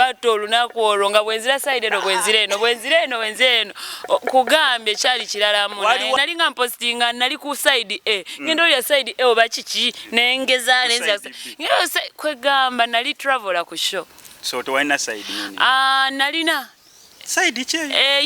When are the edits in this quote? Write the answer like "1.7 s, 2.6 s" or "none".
6.2 s